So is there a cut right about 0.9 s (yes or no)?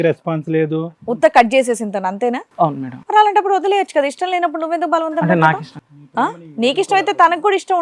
yes